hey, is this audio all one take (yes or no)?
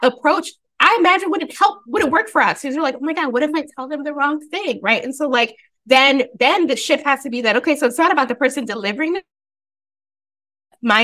yes